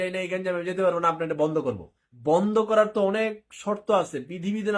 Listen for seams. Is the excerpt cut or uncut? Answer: uncut